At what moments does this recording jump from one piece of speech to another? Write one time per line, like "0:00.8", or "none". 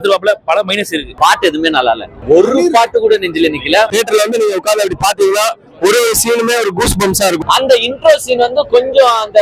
0:01.0
0:02.1
0:03.9
0:07.4